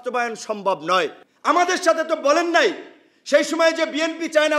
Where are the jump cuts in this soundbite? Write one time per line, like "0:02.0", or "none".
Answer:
0:01.3